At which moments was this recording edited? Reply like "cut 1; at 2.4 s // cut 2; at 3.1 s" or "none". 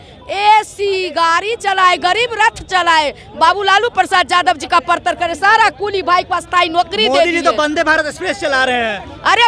none